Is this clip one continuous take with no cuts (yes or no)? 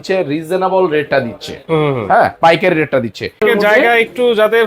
no